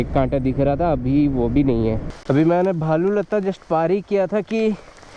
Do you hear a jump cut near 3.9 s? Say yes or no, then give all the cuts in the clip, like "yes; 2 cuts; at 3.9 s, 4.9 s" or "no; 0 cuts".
no; 1 cut; at 2.1 s